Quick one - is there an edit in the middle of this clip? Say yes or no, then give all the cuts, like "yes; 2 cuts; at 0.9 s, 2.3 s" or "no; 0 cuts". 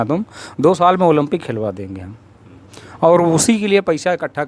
no; 0 cuts